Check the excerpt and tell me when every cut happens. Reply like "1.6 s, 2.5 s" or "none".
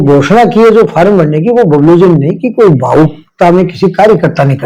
none